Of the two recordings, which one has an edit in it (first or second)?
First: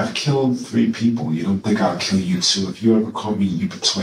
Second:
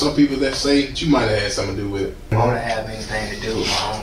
second